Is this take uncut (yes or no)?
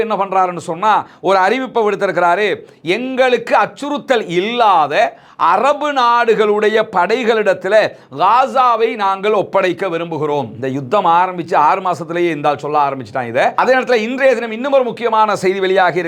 no